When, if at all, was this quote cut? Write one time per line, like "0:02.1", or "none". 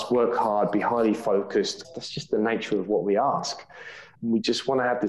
0:01.8